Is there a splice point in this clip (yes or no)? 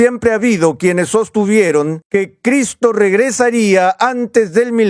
yes